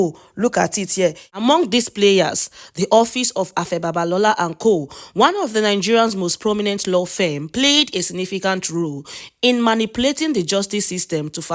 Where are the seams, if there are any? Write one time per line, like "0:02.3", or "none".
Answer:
0:01.4

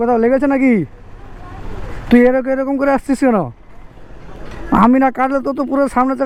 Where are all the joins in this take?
none

